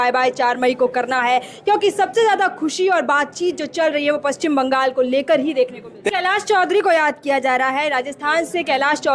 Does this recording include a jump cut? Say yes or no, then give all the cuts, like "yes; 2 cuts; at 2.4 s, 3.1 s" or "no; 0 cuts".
yes; 1 cut; at 6.0 s